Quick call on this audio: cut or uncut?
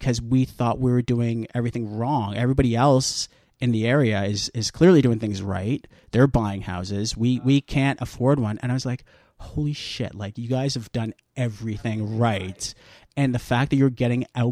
uncut